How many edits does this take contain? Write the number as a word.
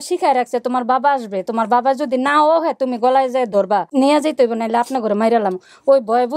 one